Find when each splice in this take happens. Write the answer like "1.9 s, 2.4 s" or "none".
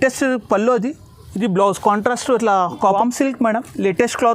2.9 s